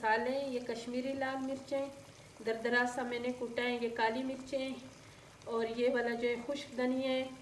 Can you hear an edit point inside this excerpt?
no; 0 cuts

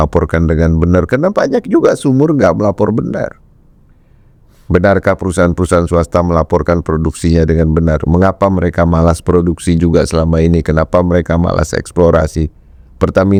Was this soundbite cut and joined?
no; 0 cuts

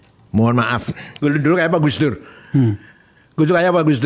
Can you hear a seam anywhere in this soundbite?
yes; 1 cut; at 1.0 s

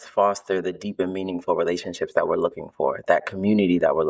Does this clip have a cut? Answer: no; 0 cuts

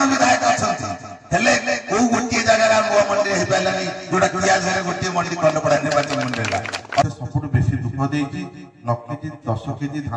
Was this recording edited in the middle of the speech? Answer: yes; 1 cut; at 7.0 s

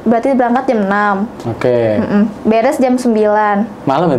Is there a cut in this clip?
no; 0 cuts

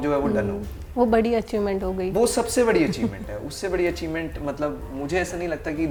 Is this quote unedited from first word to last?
yes; 0 cuts

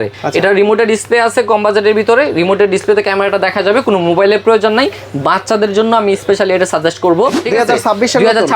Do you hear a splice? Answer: yes; 1 cut; at 7.4 s

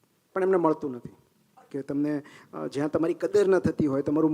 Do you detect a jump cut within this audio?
yes; 1 cut; at 1.6 s

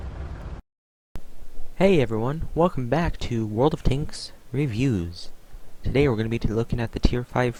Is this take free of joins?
yes; 0 cuts

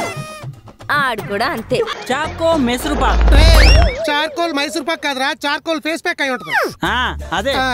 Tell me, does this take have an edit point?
yes; 1 cut; at 2.0 s

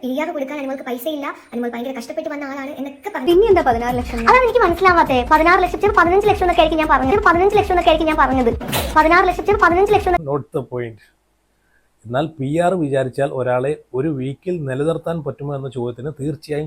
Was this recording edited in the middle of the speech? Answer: yes; 2 cuts; at 3.3 s, 10.2 s

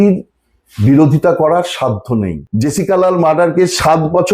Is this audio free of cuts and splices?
no; 1 cut; at 2.4 s

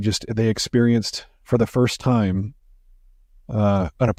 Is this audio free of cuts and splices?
yes; 0 cuts

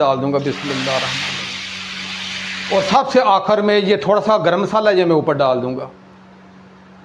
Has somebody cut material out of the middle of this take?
no; 0 cuts

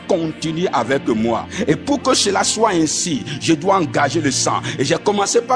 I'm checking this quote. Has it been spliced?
yes; 1 cut; at 1.5 s

